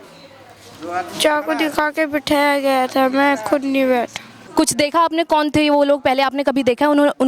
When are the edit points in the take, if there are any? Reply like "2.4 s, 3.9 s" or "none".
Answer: 4.4 s